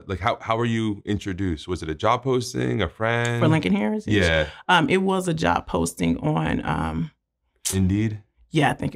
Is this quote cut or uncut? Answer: uncut